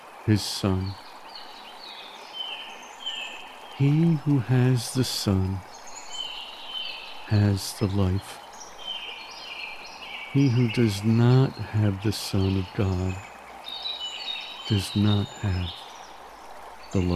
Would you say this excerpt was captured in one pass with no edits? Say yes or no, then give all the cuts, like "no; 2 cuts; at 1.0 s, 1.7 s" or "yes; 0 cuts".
yes; 0 cuts